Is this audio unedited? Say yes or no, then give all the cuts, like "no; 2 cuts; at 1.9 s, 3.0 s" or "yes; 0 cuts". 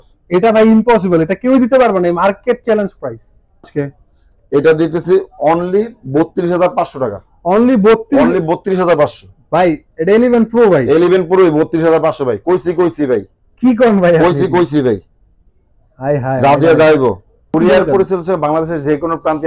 no; 2 cuts; at 3.7 s, 17.5 s